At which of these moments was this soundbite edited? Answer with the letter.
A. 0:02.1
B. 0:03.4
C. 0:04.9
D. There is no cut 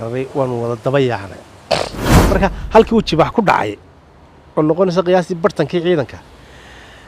A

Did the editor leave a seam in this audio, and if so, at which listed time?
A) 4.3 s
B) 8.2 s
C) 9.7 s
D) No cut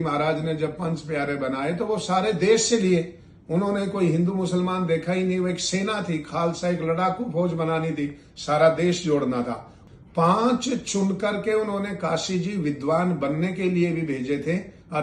C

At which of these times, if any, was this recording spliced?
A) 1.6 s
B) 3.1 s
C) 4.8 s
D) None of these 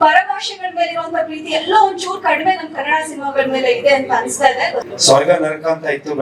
C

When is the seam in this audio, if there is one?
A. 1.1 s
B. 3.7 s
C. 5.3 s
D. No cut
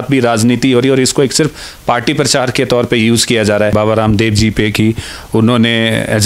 B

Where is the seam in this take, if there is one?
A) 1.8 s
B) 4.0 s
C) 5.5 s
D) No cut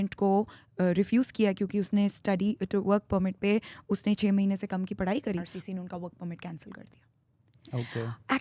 C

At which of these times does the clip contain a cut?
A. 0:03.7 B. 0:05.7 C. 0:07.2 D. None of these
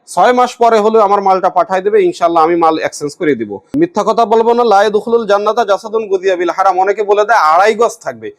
A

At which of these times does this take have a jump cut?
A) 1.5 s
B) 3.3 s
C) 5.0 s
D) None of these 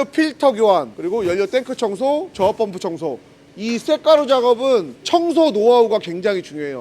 B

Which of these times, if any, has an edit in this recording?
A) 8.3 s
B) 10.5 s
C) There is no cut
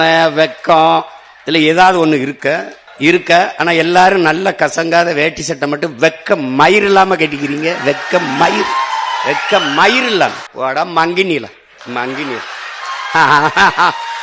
B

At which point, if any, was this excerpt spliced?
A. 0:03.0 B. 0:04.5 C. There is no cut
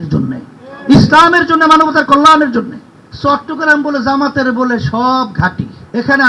A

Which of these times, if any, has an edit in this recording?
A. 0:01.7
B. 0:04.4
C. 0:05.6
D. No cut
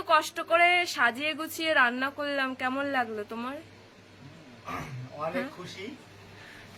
D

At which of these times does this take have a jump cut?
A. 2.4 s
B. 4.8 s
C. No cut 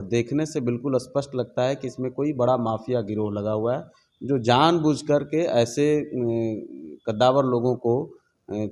C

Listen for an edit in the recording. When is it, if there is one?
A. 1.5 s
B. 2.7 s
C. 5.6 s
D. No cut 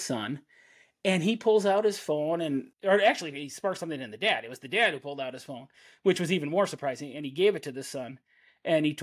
B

